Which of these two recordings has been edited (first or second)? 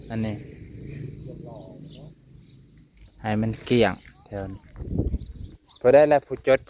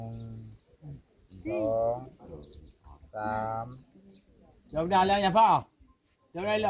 first